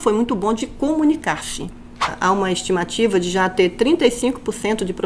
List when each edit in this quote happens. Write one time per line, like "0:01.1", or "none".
0:02.1